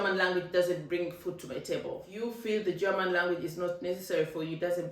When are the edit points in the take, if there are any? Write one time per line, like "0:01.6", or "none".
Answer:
0:02.1